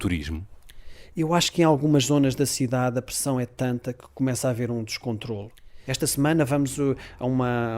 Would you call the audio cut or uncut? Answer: cut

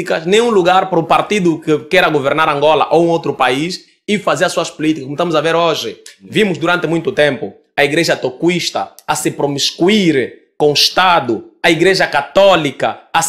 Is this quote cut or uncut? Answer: uncut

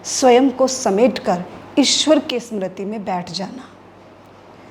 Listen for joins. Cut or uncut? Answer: uncut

